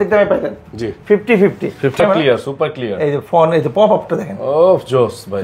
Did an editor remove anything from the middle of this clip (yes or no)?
yes